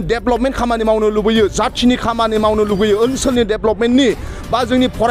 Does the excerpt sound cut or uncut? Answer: uncut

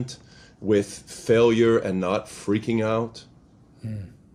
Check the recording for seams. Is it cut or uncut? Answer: uncut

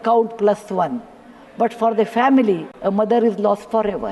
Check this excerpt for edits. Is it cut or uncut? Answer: cut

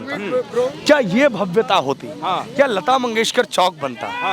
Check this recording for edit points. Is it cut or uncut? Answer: uncut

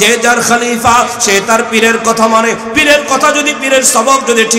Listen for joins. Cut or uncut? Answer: uncut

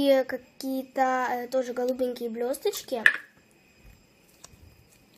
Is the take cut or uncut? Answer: uncut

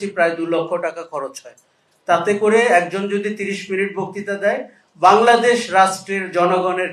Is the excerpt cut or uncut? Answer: uncut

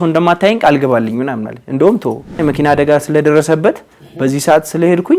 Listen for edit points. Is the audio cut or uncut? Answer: cut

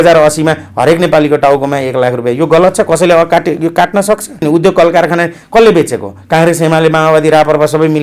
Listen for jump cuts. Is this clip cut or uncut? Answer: cut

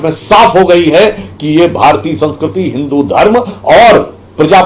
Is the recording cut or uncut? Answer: uncut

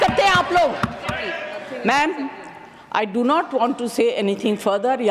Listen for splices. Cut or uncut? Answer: cut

